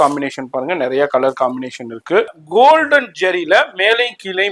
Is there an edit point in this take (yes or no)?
yes